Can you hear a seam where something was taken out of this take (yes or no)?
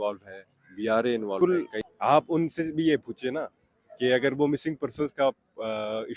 yes